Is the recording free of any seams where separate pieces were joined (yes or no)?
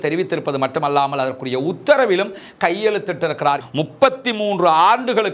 no